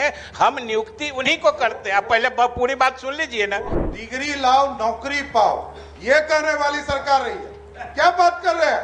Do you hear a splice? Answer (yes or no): yes